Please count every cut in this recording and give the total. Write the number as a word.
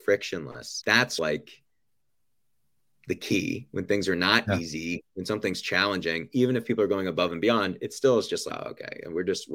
two